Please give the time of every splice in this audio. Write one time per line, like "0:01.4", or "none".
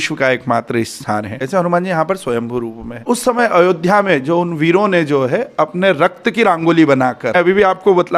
0:01.4
0:03.0
0:07.3